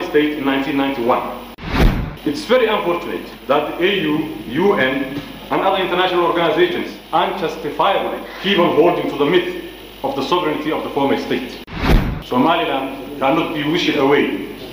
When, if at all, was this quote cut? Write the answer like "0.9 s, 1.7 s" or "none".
1.7 s, 3.3 s, 6.9 s, 8.3 s, 11.7 s